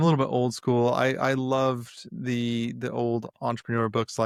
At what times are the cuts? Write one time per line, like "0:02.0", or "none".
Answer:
none